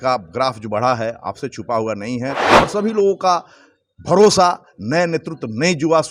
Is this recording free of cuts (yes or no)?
no